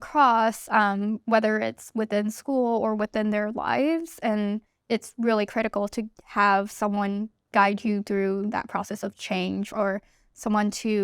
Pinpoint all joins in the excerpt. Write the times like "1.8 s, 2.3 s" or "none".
4.7 s